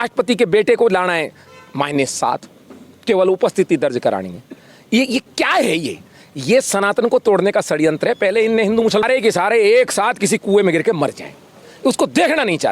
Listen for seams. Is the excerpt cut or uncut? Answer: cut